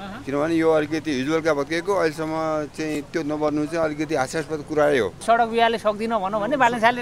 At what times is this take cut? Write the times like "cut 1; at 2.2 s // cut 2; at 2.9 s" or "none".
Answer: cut 1; at 5.2 s